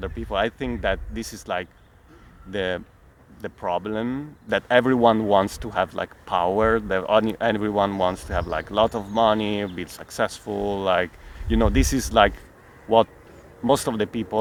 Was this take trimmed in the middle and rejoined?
no; 0 cuts

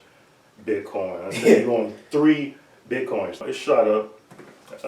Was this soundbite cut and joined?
yes; 1 cut; at 3.5 s

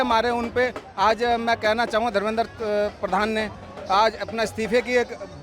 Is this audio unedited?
yes; 0 cuts

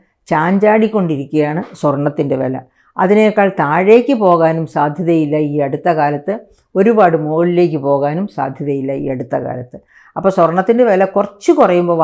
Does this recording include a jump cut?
no; 0 cuts

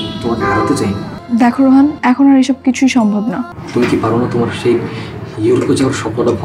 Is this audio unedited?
no; 3 cuts; at 1.1 s, 2.0 s, 3.6 s

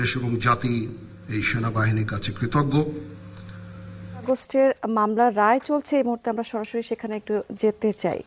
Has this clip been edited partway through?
yes; 1 cut; at 4.2 s

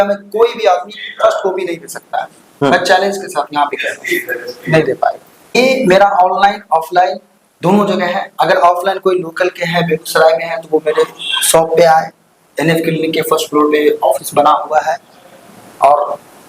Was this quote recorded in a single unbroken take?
no; 1 cut; at 5.3 s

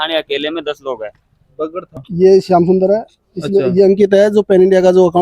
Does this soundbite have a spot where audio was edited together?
yes; 1 cut; at 2.0 s

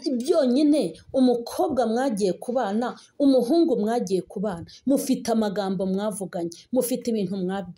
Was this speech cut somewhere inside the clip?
no; 0 cuts

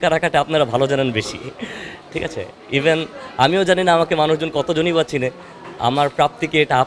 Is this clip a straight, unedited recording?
yes; 0 cuts

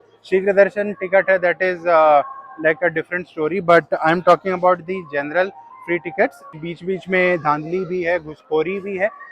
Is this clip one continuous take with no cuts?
no; 1 cut; at 6.5 s

